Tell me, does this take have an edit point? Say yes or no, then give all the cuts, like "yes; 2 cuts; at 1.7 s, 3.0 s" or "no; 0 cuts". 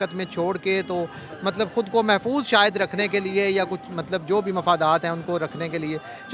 no; 0 cuts